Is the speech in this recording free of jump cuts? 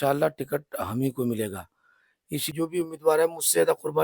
no; 1 cut; at 2.5 s

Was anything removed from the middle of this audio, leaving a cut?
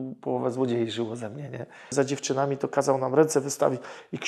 yes; 1 cut; at 1.9 s

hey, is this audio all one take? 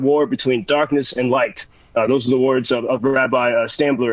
yes; 0 cuts

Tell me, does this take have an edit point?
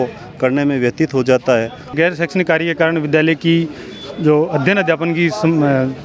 yes; 1 cut; at 1.9 s

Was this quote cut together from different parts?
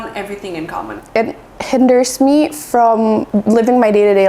yes; 2 cuts; at 1.0 s, 3.3 s

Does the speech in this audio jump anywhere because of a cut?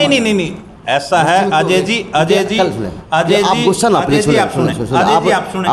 no; 0 cuts

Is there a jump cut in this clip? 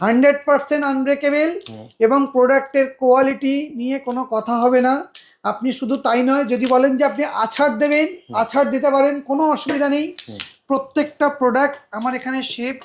no; 0 cuts

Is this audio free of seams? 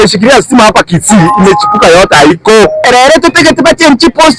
no; 1 cut; at 2.8 s

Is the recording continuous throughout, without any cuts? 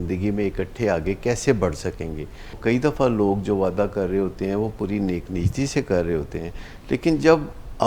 no; 1 cut; at 2.6 s

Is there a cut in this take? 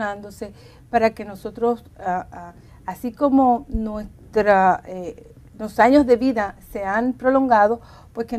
yes; 1 cut; at 7.5 s

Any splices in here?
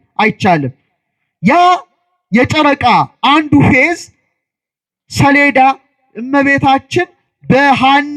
no; 0 cuts

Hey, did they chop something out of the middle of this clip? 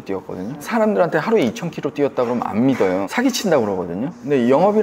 no; 0 cuts

